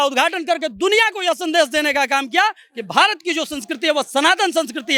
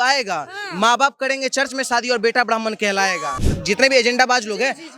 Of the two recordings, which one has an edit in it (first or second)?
second